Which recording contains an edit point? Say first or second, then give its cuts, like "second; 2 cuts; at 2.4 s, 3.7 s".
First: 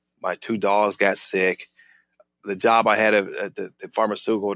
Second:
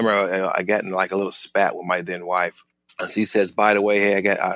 second; 1 cut; at 2.7 s